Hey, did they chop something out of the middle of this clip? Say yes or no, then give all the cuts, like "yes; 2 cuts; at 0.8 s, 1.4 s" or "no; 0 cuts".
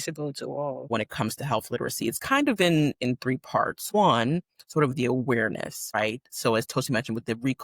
yes; 3 cuts; at 0.9 s, 3.9 s, 6.0 s